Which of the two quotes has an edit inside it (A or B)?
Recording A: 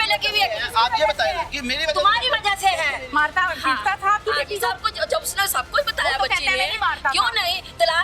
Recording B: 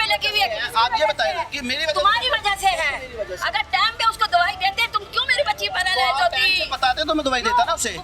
A